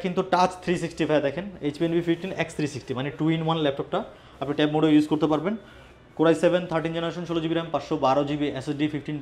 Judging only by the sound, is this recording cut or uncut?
uncut